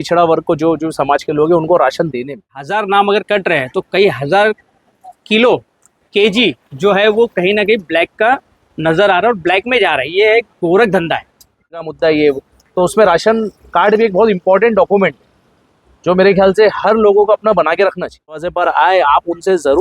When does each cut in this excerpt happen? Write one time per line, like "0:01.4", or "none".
0:02.6
0:11.8
0:18.4